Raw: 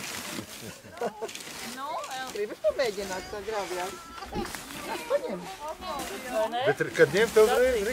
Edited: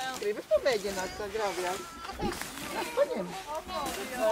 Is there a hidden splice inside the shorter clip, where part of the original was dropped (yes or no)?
no